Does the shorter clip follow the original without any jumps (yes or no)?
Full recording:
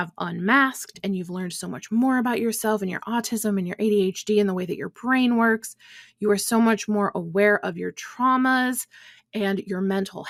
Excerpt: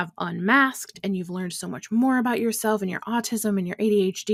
yes